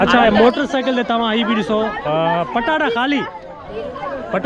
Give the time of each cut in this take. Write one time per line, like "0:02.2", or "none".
none